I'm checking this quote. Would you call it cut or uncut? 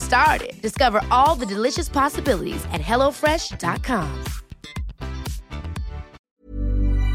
cut